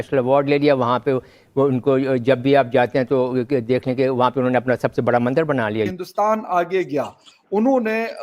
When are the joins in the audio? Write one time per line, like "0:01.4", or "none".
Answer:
0:06.0